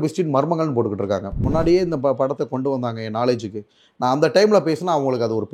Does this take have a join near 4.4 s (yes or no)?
no